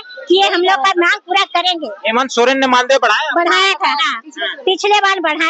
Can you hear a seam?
no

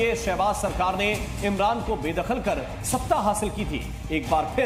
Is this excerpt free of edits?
yes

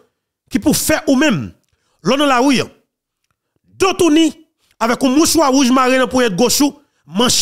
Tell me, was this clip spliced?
no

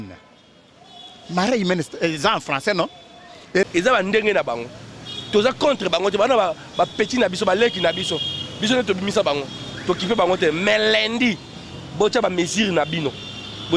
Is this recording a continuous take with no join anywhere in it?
no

